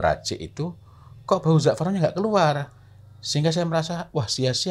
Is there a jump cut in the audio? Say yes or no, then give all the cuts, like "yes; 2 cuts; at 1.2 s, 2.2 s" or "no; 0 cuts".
no; 0 cuts